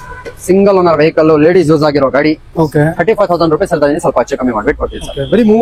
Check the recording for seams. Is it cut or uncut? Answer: uncut